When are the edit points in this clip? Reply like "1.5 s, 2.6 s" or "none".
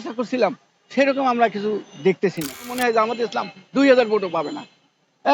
2.7 s

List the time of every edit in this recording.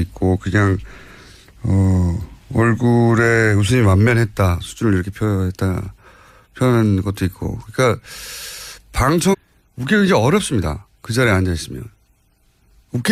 none

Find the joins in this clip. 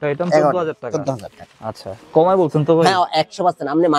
none

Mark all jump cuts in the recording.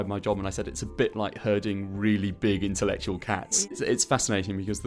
3.8 s

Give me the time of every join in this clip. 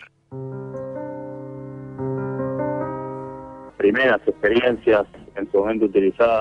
none

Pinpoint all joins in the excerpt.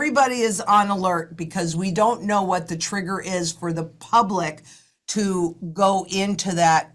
none

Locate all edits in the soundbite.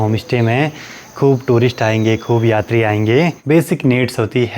3.4 s

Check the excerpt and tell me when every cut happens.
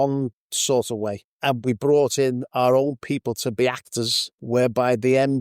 1.6 s, 4.4 s

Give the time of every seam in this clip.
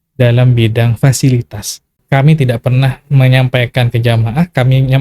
2.0 s

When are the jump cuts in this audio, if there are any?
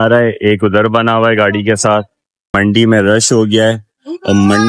none

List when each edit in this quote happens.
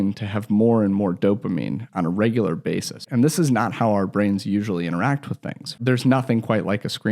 3.1 s, 5.8 s

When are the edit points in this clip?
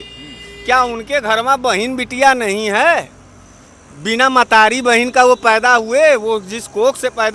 none

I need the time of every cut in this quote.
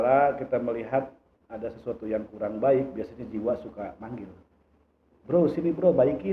none

